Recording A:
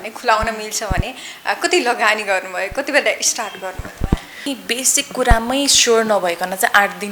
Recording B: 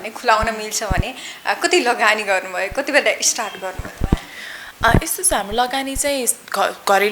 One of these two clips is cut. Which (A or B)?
A